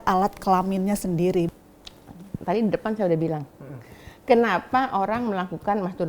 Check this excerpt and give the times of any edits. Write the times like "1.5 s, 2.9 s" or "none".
1.5 s